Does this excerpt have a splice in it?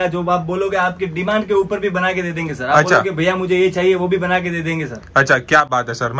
no; 0 cuts

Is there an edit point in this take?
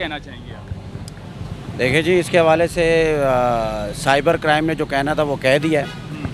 no; 0 cuts

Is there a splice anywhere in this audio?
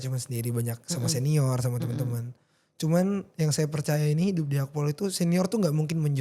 no; 0 cuts

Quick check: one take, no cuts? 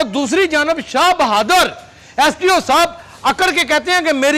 yes; 0 cuts

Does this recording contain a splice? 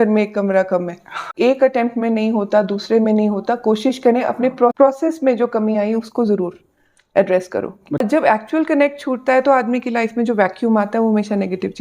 yes; 3 cuts; at 1.2 s, 4.7 s, 8.0 s

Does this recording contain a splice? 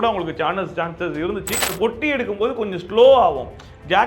yes; 1 cut; at 1.7 s

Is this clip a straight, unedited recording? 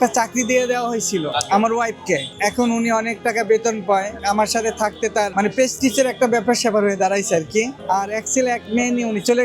no; 3 cuts; at 4.1 s, 5.3 s, 7.8 s

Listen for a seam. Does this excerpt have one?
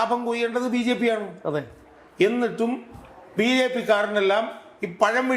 no; 0 cuts

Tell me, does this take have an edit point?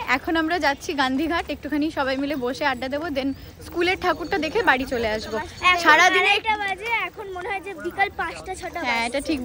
no; 0 cuts

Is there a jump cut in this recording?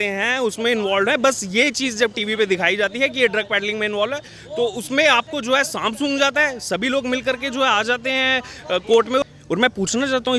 yes; 1 cut; at 9.2 s

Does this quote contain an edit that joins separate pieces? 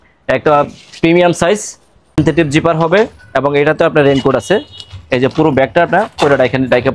yes; 1 cut; at 2.2 s

